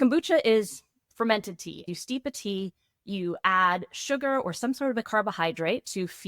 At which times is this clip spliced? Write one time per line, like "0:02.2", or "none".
0:01.9
0:05.1